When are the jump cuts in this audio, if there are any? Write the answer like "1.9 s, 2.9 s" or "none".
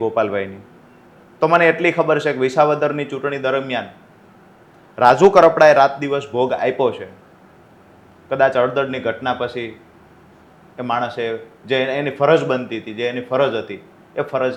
none